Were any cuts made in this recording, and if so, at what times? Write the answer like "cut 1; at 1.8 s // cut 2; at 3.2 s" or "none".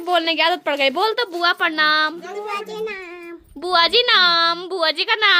none